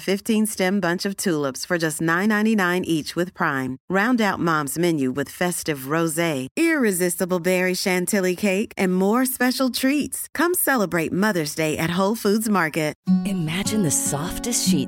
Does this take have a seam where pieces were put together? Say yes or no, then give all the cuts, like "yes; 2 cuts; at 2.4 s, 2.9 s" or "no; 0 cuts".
yes; 1 cut; at 13.0 s